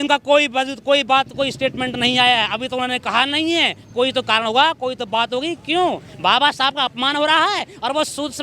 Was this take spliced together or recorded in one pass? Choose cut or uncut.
uncut